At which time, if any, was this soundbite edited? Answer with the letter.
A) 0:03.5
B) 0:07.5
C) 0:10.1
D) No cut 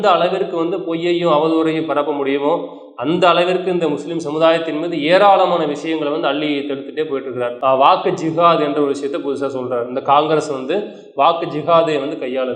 B